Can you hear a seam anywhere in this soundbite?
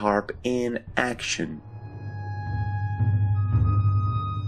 no; 0 cuts

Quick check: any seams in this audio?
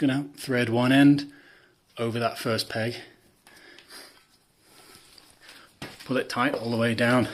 no; 0 cuts

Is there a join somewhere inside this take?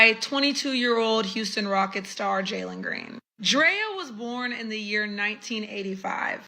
yes; 1 cut; at 3.3 s

